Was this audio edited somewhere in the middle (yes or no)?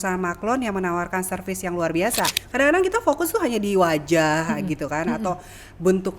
yes